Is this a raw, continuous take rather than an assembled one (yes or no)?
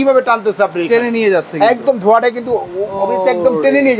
yes